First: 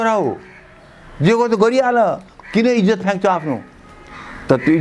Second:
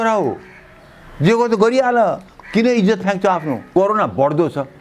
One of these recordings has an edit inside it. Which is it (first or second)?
second